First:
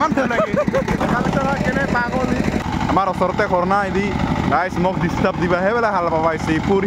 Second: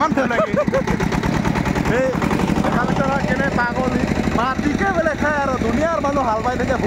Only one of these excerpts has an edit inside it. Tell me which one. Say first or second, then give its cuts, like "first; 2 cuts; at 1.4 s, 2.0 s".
first; 2 cuts; at 1.0 s, 2.6 s